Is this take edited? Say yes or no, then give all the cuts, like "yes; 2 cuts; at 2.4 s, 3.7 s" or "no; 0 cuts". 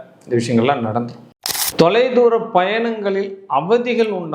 yes; 1 cut; at 1.3 s